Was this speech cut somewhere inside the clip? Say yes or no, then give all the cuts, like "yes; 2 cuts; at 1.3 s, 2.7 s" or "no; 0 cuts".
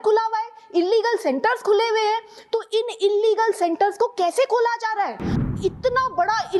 yes; 1 cut; at 5.5 s